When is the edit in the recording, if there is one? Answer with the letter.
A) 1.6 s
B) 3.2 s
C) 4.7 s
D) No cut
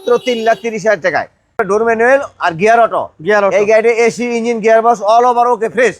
A